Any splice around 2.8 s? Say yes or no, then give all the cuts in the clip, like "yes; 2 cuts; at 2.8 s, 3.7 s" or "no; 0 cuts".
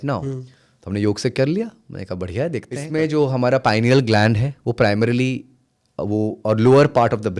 yes; 1 cut; at 2.8 s